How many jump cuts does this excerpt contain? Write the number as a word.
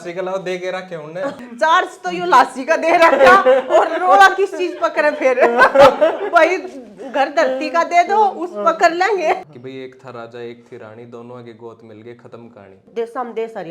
three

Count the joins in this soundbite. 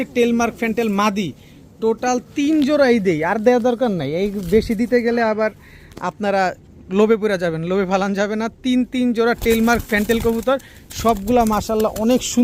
zero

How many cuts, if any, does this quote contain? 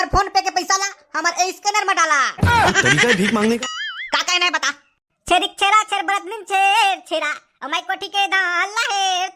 one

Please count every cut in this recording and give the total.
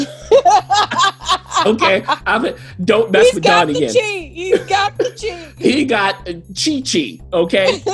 zero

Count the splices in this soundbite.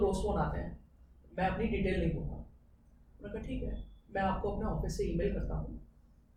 zero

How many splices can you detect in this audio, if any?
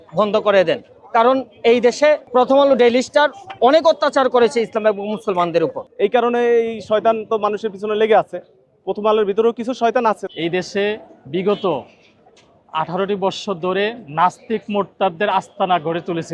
three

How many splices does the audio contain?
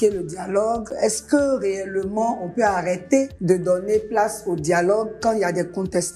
two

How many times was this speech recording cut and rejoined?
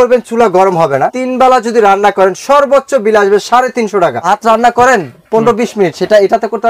two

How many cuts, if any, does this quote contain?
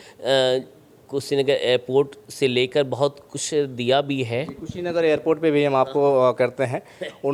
zero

